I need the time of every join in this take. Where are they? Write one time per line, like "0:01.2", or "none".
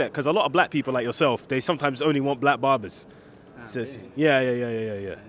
none

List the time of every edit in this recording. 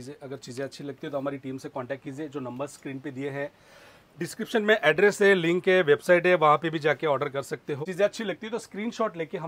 0:07.8

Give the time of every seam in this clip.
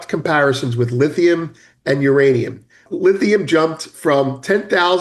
0:02.8

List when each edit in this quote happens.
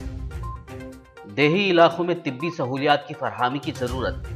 0:01.0

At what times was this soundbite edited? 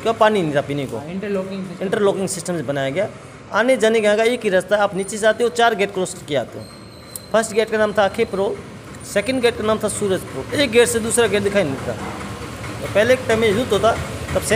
none

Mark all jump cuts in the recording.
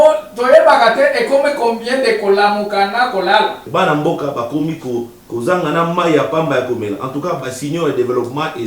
0:03.6

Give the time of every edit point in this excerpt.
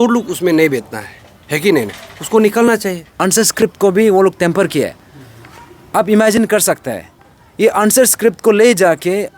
0:03.1

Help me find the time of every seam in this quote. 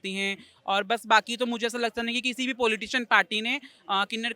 none

